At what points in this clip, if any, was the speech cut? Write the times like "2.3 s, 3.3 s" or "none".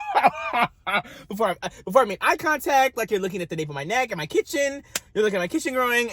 none